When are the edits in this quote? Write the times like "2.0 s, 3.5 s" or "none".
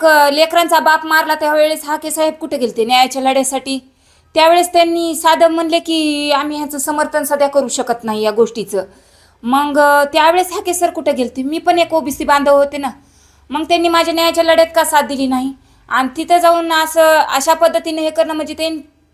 none

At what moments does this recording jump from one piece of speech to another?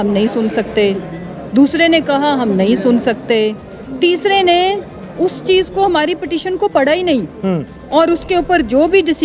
none

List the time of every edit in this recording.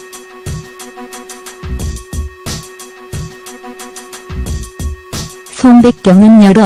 none

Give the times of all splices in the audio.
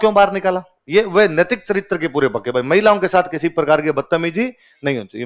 none

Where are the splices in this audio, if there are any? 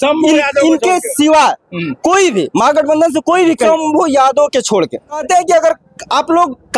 3.7 s, 5.2 s

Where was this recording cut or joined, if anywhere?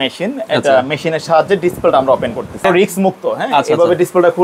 2.7 s

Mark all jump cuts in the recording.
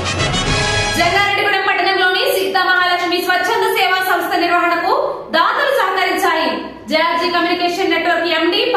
0.9 s

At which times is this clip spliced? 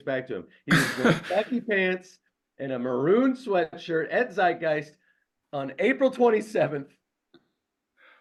none

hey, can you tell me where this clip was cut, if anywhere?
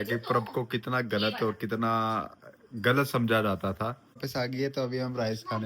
4.2 s

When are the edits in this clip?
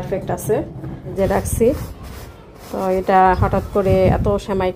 1.2 s

